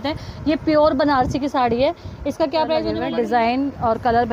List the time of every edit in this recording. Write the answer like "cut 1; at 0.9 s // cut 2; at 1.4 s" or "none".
cut 1; at 3.0 s